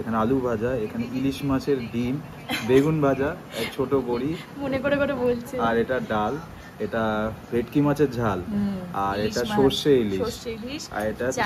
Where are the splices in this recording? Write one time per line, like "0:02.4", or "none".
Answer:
none